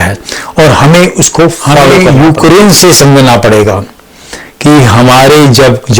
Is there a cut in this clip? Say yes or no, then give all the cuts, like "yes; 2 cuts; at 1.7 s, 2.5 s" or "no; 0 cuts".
yes; 1 cut; at 2.0 s